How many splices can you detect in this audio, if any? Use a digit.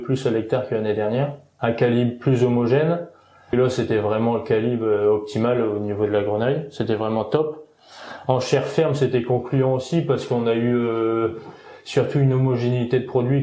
1